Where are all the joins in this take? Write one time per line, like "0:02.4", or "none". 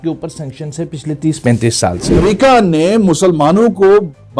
0:02.2